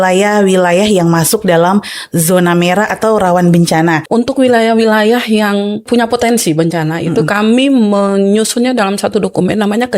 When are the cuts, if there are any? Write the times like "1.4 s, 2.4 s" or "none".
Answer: 4.0 s, 5.8 s